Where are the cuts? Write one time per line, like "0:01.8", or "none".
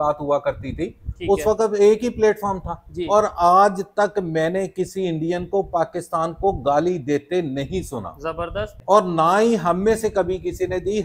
0:08.8